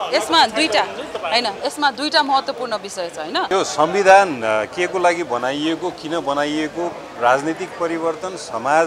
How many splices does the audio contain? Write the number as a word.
one